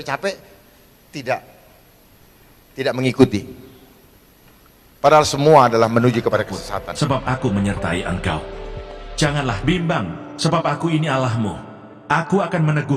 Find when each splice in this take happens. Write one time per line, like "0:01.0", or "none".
0:06.9

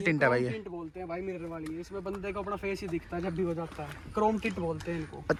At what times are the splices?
none

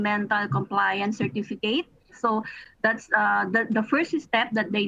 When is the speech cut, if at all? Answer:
0:02.1

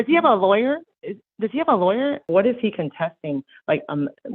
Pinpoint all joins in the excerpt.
0:02.2

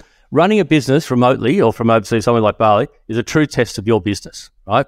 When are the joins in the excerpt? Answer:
0:01.8

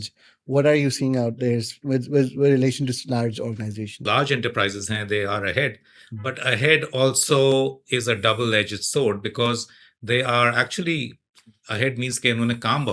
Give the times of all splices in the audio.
0:04.0

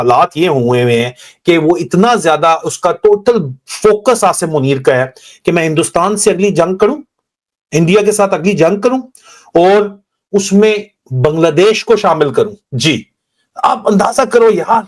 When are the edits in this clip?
none

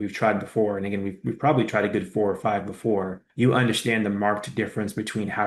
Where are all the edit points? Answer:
none

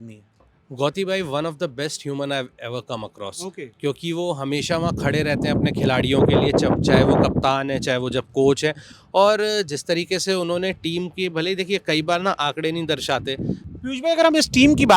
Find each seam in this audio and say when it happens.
none

